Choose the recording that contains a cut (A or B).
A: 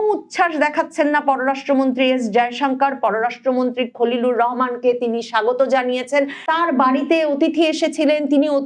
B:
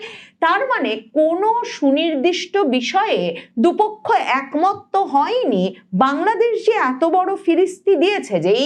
A